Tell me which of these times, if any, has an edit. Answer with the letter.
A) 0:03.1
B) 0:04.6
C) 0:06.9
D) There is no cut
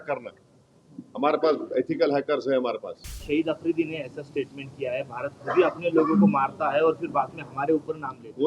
A